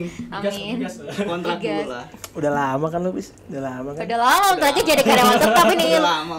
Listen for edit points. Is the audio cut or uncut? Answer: uncut